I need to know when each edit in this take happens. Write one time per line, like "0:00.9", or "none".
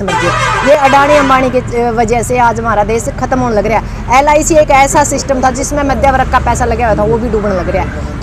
none